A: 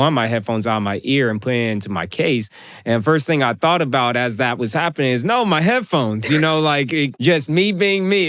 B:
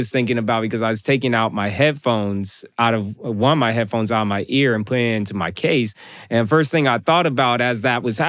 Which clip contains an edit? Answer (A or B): A